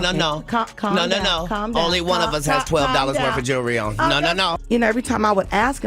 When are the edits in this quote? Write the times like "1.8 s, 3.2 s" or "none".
4.5 s